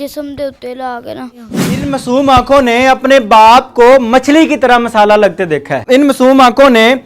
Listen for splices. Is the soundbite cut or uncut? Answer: cut